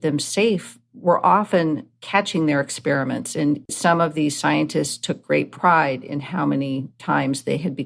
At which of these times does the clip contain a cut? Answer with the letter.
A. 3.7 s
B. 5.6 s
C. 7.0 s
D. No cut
A